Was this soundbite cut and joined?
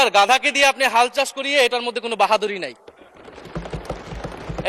no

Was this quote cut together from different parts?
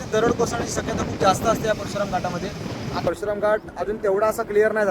yes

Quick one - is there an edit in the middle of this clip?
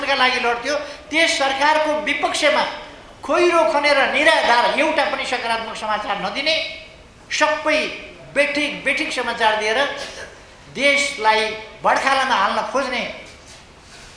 no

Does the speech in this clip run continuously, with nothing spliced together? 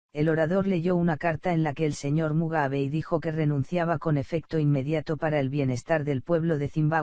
yes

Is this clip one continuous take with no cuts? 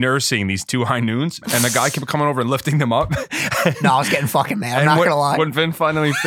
no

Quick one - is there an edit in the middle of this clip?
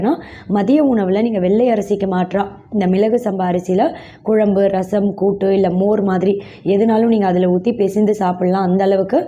no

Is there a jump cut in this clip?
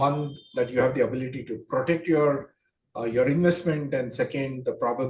no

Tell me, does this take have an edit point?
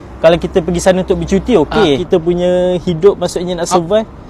yes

